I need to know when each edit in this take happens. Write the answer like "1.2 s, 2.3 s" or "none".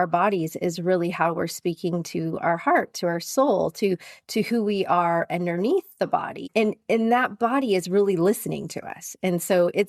none